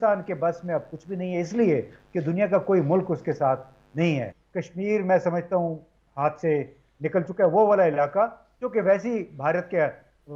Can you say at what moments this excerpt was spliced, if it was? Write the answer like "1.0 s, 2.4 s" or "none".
4.4 s